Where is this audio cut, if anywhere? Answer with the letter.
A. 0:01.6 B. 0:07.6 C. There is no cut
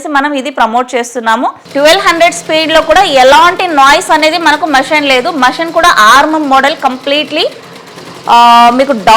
A